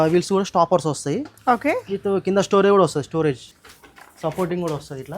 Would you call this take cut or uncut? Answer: cut